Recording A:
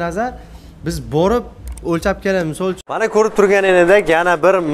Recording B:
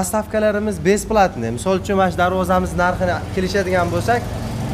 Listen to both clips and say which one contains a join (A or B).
A